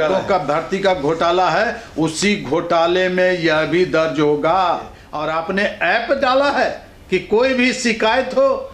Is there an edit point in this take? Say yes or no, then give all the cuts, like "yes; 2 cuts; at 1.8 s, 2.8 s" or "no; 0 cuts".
yes; 1 cut; at 5.0 s